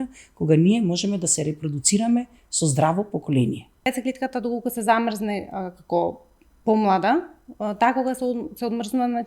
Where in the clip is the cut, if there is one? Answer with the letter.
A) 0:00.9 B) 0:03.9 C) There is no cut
B